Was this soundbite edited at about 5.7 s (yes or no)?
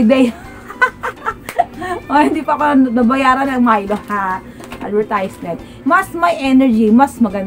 yes